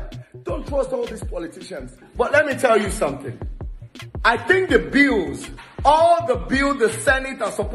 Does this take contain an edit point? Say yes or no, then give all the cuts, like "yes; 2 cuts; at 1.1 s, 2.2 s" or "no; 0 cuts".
yes; 1 cut; at 1.9 s